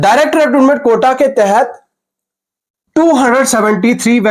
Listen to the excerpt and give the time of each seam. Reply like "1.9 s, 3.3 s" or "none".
none